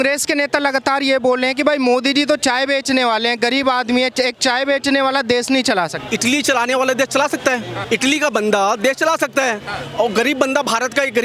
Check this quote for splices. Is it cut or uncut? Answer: cut